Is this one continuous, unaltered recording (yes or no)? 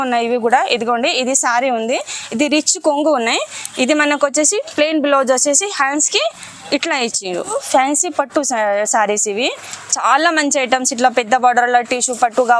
no